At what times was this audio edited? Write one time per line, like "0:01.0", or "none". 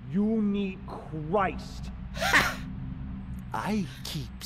none